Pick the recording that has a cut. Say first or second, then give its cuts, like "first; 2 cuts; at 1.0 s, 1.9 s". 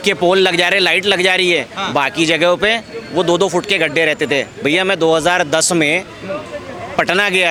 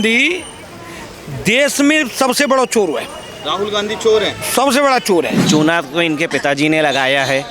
second; 1 cut; at 5.4 s